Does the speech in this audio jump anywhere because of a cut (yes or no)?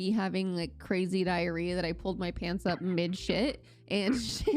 no